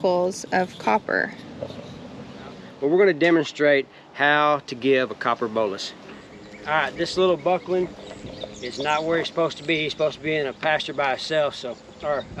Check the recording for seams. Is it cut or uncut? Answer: cut